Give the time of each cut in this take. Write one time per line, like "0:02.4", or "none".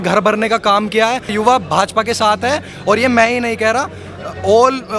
0:01.3